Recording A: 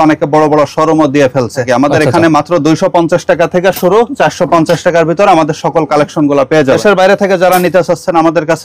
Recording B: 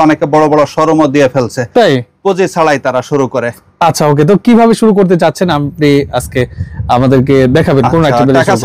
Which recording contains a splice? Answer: A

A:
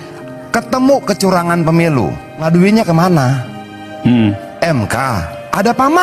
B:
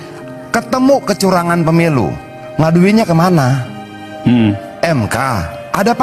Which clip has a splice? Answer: A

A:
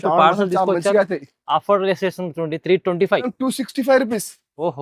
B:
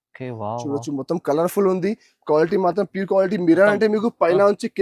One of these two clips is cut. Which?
A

